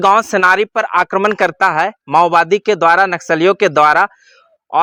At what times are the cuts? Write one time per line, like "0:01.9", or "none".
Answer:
none